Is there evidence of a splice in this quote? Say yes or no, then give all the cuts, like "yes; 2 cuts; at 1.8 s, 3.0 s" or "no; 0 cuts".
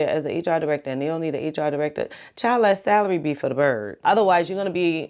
yes; 1 cut; at 3.9 s